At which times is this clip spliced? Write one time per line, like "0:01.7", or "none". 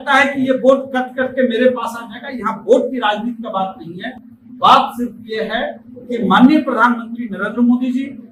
none